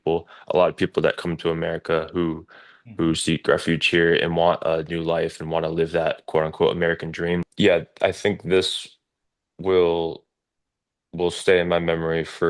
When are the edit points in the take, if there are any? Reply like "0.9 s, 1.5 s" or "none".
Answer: 7.5 s